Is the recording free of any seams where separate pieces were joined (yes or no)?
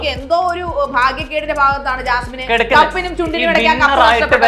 yes